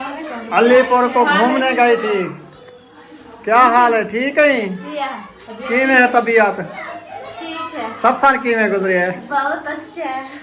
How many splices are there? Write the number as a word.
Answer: zero